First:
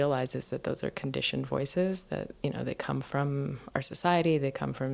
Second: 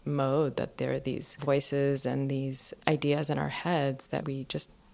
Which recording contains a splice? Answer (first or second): second